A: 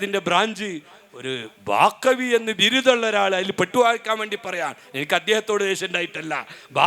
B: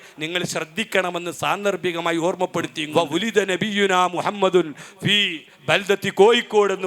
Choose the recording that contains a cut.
B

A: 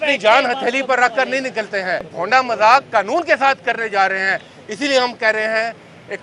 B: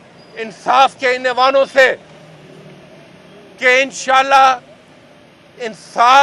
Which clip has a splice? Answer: A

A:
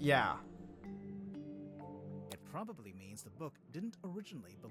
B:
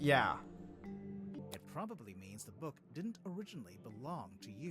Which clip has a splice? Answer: B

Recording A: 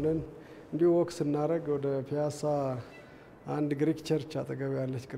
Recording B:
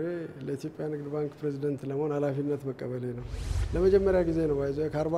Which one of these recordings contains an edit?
B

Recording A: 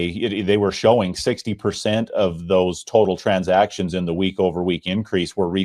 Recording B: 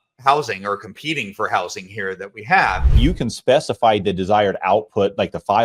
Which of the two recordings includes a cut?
B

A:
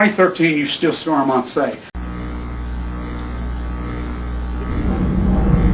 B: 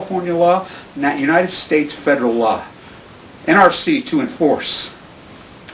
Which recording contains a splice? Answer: A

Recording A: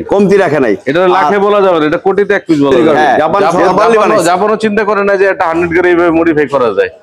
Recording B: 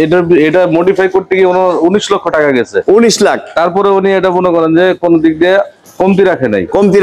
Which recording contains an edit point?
A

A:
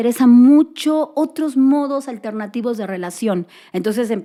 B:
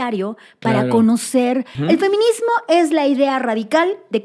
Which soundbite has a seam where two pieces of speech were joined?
B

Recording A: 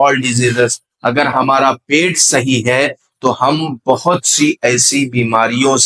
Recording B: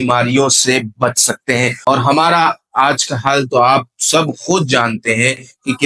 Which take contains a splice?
B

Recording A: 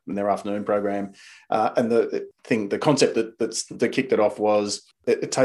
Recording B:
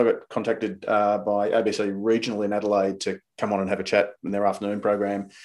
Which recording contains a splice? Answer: A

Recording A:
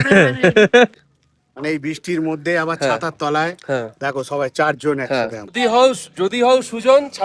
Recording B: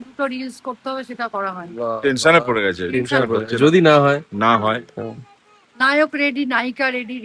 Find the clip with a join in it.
A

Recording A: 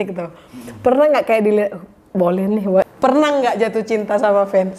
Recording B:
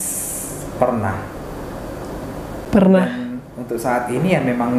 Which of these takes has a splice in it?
A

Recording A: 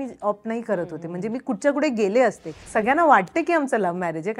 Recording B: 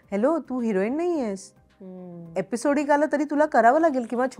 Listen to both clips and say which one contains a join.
A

